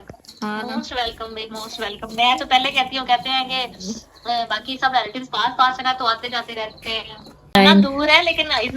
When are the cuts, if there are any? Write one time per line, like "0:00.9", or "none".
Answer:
0:07.6